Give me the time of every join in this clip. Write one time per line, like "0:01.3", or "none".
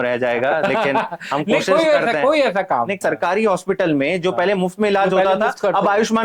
0:03.0